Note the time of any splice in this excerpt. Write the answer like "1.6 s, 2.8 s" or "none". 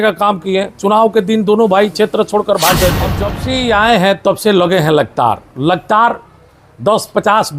3.3 s